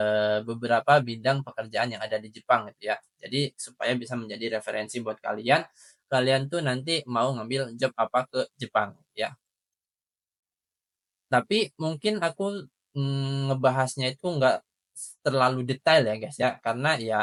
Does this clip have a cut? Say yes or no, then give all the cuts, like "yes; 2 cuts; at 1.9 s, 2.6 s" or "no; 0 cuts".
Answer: no; 0 cuts